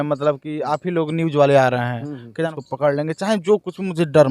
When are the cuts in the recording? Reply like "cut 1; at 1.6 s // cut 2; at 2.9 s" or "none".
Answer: cut 1; at 2.5 s

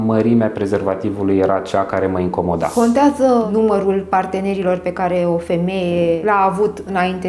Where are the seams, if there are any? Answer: cut 1; at 2.7 s // cut 2; at 3.5 s

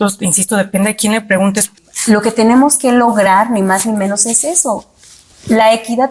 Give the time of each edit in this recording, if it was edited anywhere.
cut 1; at 1.7 s

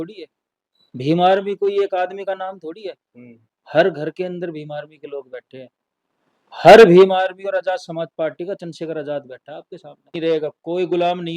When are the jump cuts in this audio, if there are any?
cut 1; at 10.2 s

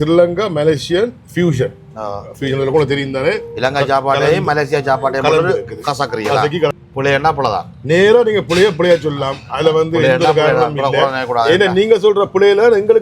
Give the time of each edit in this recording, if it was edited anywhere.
cut 1; at 6.8 s

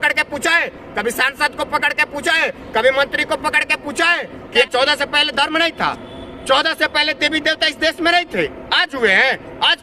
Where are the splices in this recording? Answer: cut 1; at 4.7 s

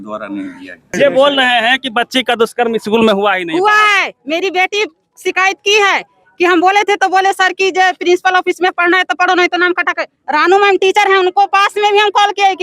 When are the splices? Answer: cut 1; at 0.9 s

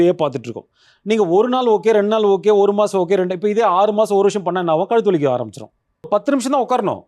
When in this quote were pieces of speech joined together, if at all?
cut 1; at 6.1 s

